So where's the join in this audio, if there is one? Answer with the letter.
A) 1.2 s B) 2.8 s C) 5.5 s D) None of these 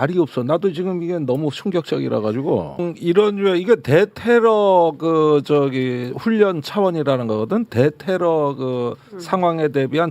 B